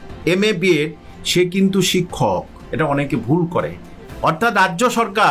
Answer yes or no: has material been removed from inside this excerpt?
no